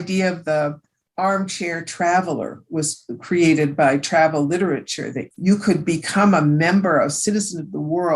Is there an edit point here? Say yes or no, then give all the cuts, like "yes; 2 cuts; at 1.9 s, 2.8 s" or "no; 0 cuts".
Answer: no; 0 cuts